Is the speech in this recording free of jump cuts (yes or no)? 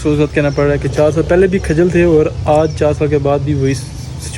yes